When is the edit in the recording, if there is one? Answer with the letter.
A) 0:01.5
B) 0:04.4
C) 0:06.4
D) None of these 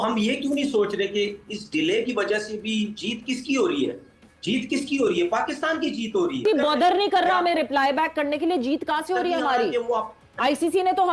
C